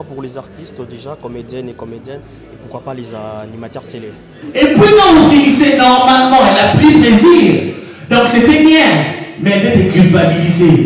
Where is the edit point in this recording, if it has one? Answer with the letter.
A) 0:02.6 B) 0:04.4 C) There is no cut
B